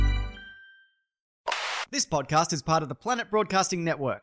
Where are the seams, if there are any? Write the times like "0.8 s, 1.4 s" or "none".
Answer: 1.4 s